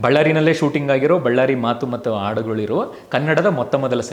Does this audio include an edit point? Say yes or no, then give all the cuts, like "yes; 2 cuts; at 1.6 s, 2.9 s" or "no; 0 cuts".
no; 0 cuts